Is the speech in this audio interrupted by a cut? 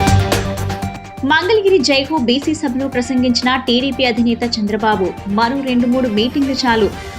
no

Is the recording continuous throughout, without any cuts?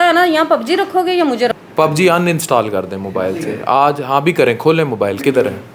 no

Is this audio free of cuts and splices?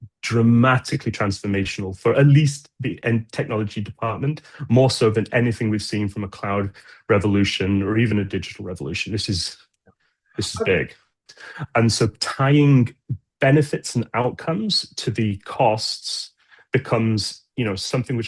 no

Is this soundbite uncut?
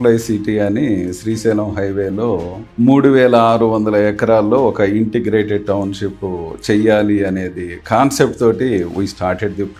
yes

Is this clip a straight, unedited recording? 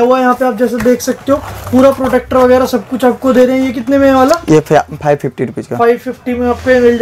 yes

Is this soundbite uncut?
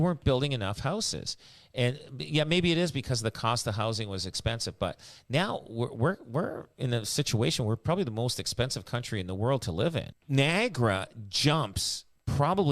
no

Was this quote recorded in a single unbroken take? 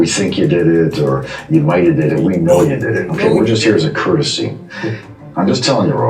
yes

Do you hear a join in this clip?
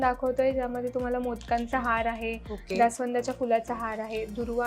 no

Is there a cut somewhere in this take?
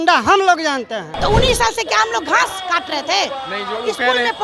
yes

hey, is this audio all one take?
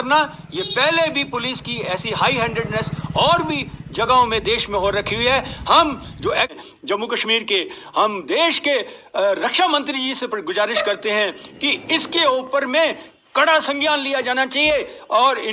no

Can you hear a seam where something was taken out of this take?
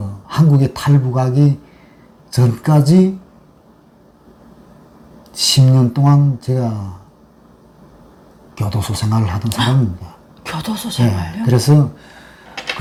no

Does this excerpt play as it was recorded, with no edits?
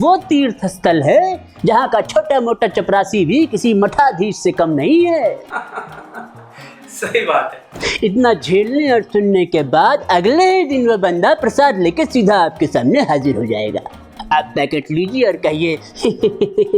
yes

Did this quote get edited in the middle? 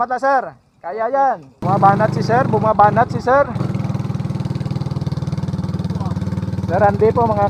yes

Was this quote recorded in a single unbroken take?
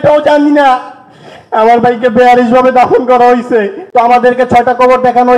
no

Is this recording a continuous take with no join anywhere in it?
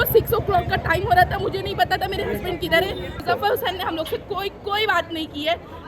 no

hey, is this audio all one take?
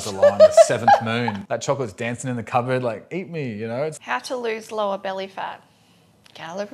no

